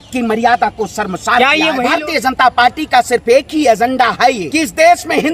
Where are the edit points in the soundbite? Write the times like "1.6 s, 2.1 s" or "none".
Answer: 1.8 s, 4.4 s